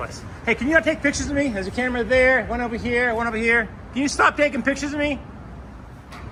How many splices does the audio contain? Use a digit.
0